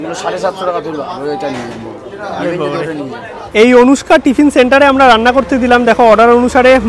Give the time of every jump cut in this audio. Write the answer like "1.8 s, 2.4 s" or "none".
3.5 s